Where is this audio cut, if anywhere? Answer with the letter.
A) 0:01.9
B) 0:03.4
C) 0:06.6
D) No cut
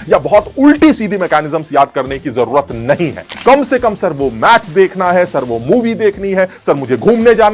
B